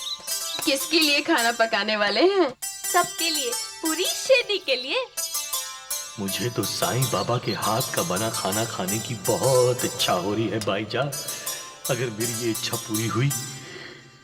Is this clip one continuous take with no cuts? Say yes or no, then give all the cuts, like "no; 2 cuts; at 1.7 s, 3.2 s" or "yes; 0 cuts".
yes; 0 cuts